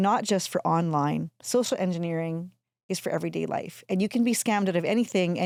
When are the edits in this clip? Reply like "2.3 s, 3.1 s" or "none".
none